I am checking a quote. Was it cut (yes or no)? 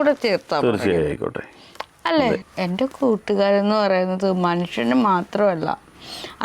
yes